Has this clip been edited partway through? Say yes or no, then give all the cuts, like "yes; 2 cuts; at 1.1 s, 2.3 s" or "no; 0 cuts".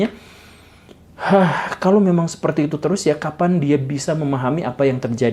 no; 0 cuts